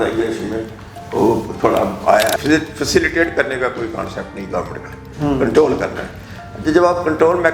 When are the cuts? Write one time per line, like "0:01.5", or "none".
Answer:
0:02.3